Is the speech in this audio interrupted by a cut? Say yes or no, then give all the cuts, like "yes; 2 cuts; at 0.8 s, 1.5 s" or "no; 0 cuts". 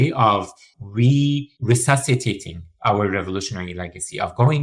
yes; 1 cut; at 1.5 s